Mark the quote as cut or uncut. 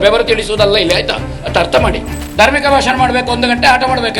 cut